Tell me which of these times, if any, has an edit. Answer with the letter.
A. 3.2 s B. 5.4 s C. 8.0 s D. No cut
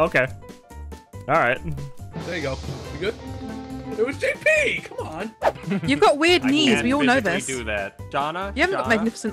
B